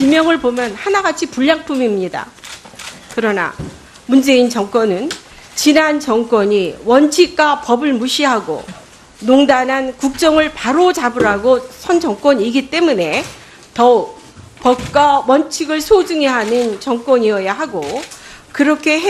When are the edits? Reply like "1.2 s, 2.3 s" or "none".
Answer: 12.3 s